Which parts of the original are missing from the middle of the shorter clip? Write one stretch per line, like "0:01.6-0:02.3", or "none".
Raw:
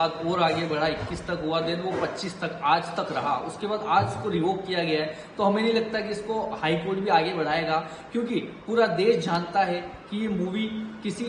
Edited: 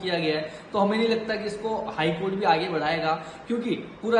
none